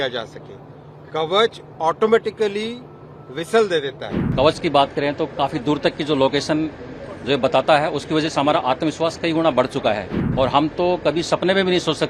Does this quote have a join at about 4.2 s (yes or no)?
yes